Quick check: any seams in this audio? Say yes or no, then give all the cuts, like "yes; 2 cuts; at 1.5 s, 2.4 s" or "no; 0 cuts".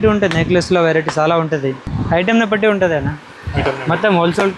yes; 1 cut; at 1.9 s